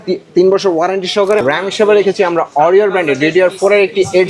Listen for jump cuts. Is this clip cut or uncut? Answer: cut